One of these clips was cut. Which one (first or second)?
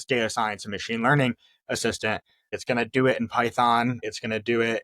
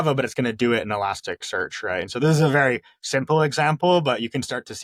first